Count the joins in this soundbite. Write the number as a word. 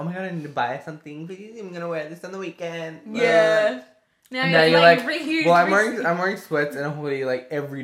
zero